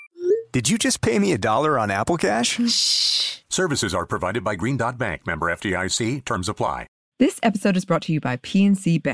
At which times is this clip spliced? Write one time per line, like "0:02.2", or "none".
0:07.0